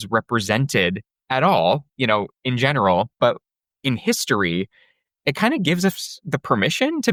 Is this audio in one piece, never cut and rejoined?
yes; 0 cuts

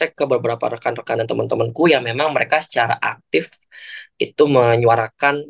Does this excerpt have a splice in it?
no; 0 cuts

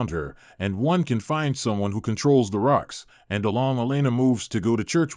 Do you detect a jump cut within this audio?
no; 0 cuts

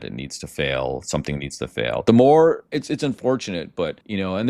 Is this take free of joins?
yes; 0 cuts

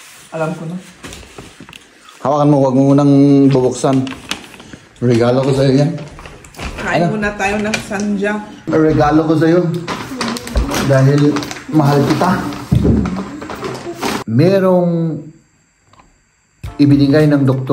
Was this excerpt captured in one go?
no; 2 cuts; at 8.7 s, 14.2 s

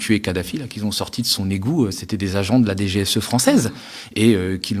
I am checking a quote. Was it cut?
no; 0 cuts

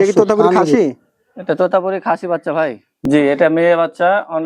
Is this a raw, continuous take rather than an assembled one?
no; 1 cut; at 2.9 s

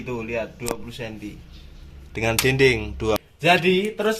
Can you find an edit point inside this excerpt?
yes; 1 cut; at 3.2 s

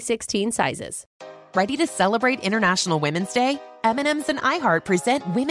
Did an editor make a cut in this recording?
yes; 1 cut; at 1.1 s

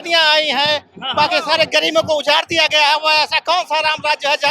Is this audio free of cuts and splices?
yes; 0 cuts

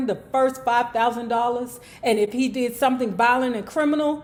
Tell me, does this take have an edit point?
no; 0 cuts

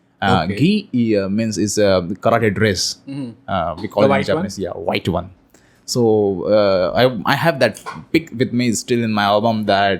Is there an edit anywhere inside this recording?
no; 0 cuts

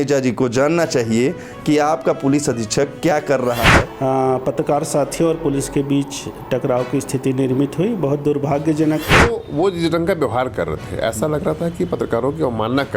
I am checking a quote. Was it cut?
yes; 2 cuts; at 3.8 s, 9.4 s

